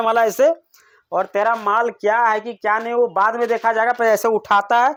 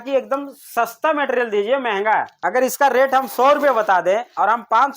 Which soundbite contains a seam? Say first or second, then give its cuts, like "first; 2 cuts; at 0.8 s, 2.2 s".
second; 1 cut; at 2.4 s